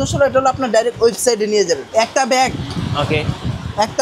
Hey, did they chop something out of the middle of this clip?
yes; 1 cut; at 1.9 s

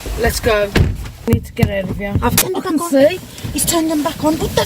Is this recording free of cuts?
no; 2 cuts; at 1.2 s, 2.4 s

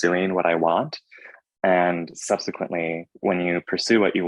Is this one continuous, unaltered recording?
no; 1 cut; at 3.1 s

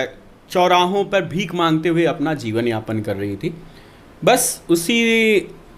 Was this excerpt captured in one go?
yes; 0 cuts

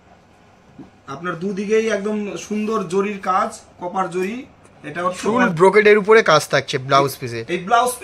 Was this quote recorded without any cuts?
no; 1 cut; at 5.2 s

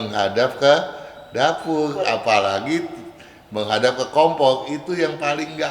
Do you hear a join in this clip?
no; 0 cuts

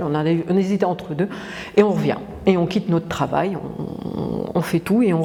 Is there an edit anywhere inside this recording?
no; 0 cuts

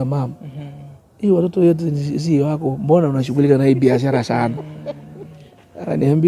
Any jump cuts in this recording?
no; 0 cuts

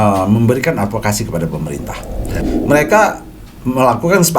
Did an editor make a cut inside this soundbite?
yes; 1 cut; at 2.5 s

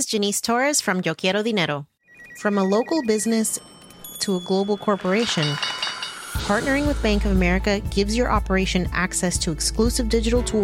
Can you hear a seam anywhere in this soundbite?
yes; 1 cut; at 1.9 s

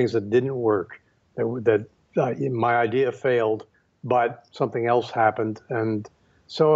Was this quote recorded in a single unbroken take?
yes; 0 cuts

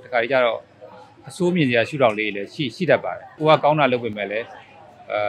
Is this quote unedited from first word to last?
no; 1 cut; at 3.3 s

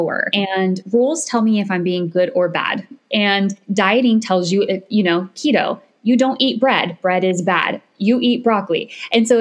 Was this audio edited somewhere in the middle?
yes; 2 cuts; at 0.8 s, 3.6 s

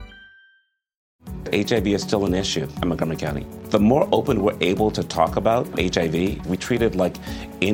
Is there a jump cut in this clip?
yes; 1 cut; at 1.2 s

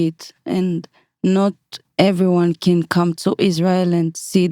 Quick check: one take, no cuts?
yes; 0 cuts

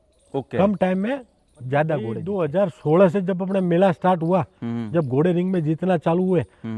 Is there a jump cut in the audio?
yes; 1 cut; at 2.2 s

